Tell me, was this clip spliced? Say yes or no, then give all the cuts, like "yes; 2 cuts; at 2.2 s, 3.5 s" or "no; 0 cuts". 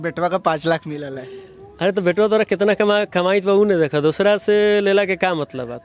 no; 0 cuts